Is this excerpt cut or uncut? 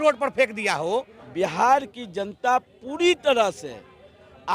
cut